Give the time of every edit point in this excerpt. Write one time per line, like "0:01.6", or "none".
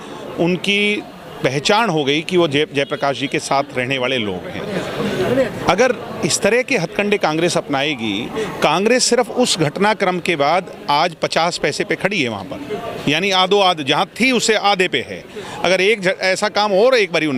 none